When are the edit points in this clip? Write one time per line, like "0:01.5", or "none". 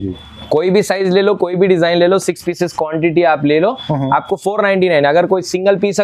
none